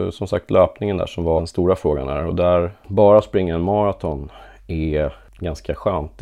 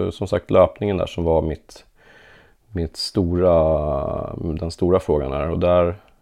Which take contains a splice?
first; 3 cuts; at 1.5 s, 2.8 s, 5.3 s

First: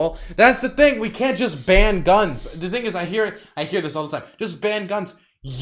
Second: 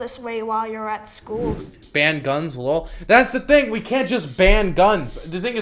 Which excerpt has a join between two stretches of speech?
second; 1 cut; at 1.6 s

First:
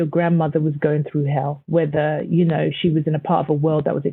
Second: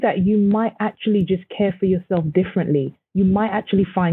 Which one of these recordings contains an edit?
first; 1 cut; at 1.6 s

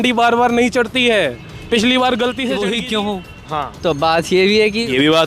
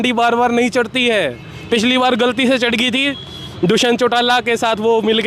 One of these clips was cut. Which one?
first; 1 cut; at 2.6 s

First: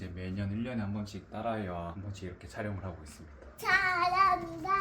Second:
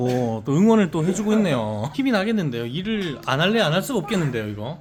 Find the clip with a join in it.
first; 2 cuts; at 2.0 s, 3.4 s

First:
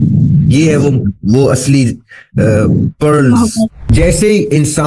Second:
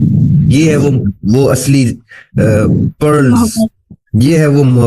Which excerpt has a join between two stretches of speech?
first; 1 cut; at 3.8 s

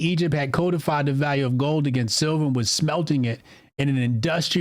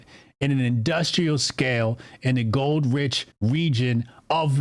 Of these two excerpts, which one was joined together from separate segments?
second; 1 cut; at 3.2 s

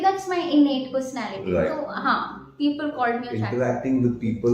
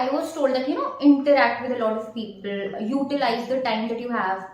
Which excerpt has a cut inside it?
first; 1 cut; at 3.4 s

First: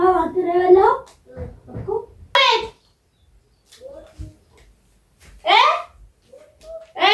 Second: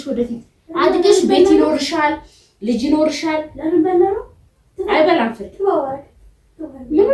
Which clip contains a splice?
first; 1 cut; at 2.3 s

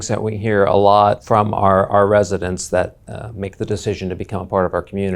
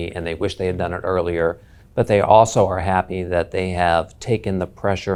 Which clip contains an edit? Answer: first; 1 cut; at 1.2 s

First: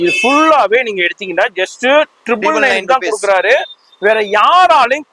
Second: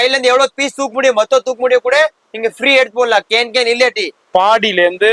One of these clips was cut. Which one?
second; 1 cut; at 4.1 s

